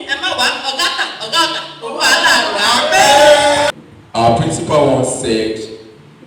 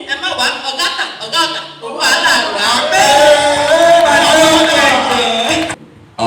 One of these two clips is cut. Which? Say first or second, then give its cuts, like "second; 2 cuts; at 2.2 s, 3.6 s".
first; 1 cut; at 3.7 s